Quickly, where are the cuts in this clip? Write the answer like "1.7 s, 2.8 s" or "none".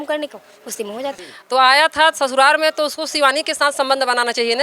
1.2 s

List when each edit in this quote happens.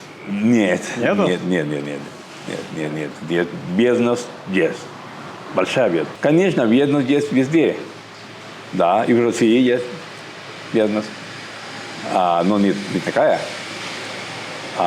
6.1 s

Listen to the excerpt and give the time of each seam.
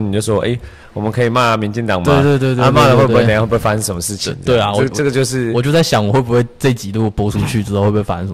none

